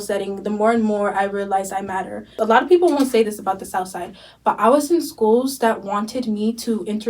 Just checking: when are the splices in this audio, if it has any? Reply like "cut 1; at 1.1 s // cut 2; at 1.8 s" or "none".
cut 1; at 2.4 s